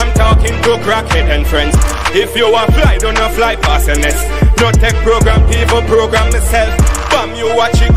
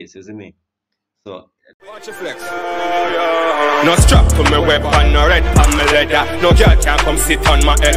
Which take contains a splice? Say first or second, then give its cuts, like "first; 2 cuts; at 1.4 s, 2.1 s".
second; 1 cut; at 1.6 s